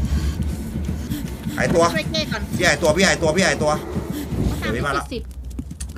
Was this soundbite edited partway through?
yes; 1 cut; at 4.6 s

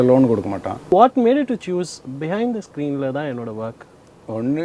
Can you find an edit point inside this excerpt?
yes; 1 cut; at 0.9 s

